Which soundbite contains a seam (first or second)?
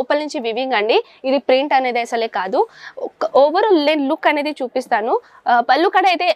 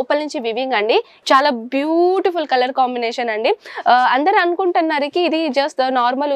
second